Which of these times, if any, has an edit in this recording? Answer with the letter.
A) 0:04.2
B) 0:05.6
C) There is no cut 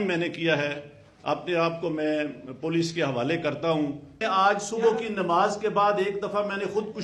A